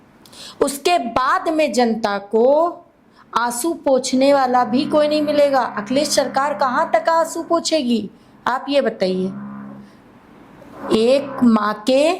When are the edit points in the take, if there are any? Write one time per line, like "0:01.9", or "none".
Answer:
none